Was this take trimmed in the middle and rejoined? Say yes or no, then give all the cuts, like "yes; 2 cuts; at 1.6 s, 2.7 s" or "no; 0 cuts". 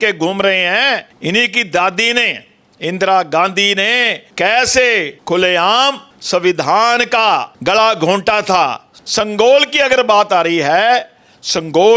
yes; 6 cuts; at 1.1 s, 4.2 s, 5.1 s, 6.1 s, 7.5 s, 8.9 s